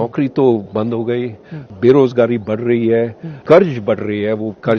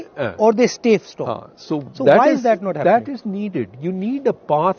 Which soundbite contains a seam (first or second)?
first